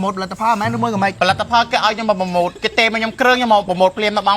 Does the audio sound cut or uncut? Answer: cut